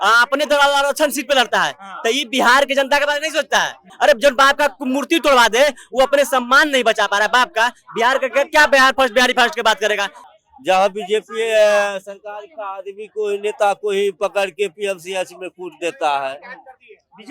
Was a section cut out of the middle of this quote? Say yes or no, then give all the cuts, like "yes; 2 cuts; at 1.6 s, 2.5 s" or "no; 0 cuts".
yes; 2 cuts; at 3.8 s, 10.1 s